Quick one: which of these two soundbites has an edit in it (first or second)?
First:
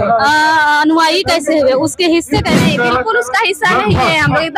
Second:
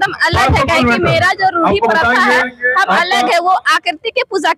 first